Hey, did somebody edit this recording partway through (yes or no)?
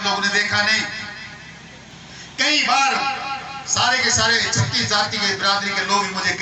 yes